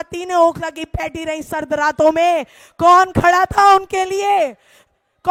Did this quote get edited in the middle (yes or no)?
no